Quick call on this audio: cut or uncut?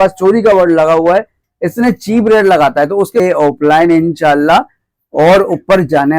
cut